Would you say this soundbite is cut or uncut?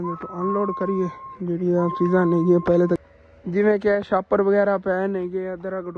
cut